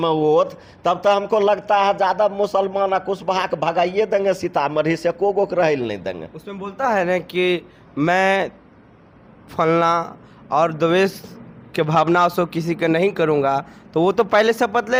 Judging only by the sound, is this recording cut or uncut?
uncut